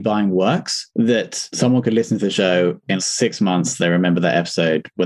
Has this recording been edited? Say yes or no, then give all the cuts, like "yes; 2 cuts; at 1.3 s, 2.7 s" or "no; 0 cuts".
no; 0 cuts